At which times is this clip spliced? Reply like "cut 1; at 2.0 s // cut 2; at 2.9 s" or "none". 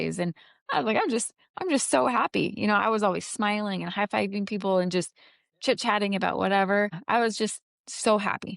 cut 1; at 6.9 s